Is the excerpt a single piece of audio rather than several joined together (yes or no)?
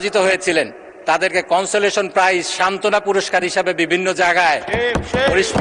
yes